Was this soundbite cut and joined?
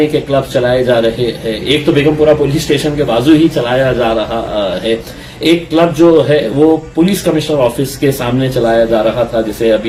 no; 0 cuts

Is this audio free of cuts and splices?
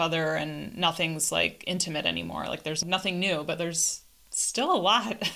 no; 1 cut; at 2.8 s

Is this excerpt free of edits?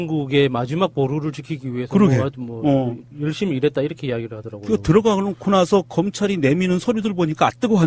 no; 1 cut; at 5.9 s

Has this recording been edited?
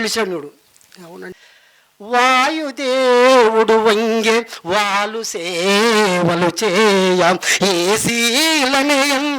yes; 1 cut; at 1.3 s

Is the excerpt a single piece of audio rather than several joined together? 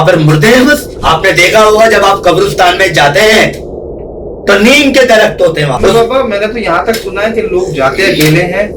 no; 2 cuts; at 0.9 s, 5.8 s

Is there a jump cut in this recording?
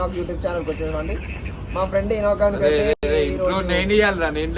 no; 0 cuts

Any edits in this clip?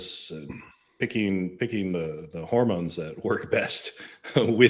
no; 0 cuts

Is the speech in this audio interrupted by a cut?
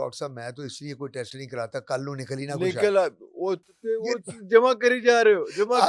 no; 0 cuts

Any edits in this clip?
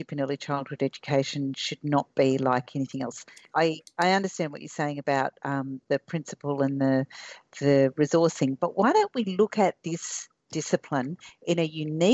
yes; 1 cut; at 3.4 s

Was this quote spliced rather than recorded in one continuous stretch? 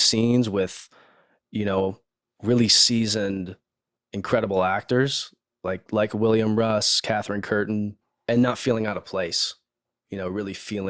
yes; 1 cut; at 8.1 s

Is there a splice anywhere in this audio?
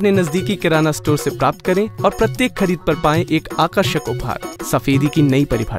yes; 1 cut; at 4.5 s

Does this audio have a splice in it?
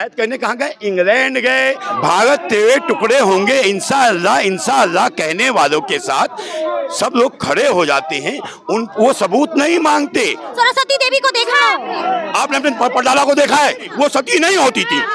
yes; 3 cuts; at 1.9 s, 10.5 s, 13.9 s

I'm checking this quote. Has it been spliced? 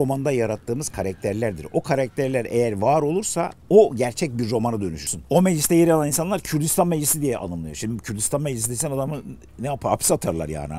yes; 1 cut; at 5.1 s

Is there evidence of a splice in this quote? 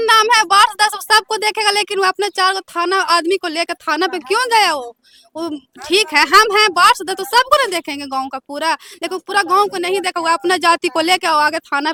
no; 0 cuts

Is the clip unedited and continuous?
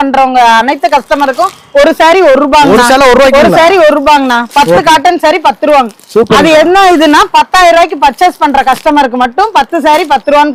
yes; 0 cuts

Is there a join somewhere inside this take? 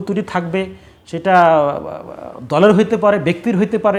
no; 0 cuts

